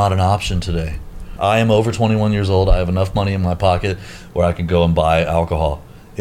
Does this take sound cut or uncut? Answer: cut